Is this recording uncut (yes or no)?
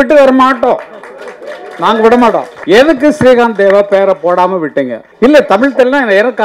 no